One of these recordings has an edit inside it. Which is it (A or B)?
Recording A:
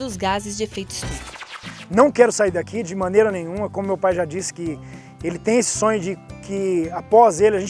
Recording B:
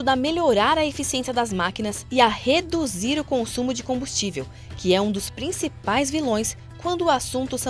A